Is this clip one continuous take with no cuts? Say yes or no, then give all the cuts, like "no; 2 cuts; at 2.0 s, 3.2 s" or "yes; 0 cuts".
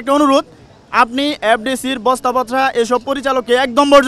yes; 0 cuts